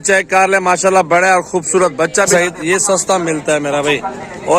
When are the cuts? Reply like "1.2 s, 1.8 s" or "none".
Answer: 2.3 s